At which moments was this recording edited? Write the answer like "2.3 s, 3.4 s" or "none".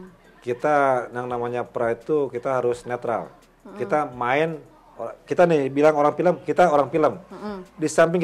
none